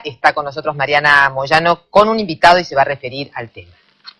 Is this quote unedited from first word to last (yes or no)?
yes